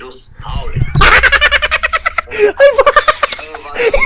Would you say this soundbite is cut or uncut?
uncut